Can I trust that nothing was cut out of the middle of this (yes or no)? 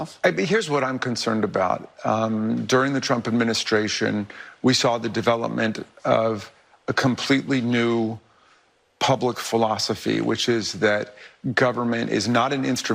yes